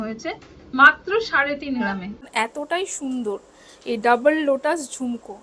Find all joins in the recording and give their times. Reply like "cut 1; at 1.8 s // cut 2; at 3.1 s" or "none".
cut 1; at 2.2 s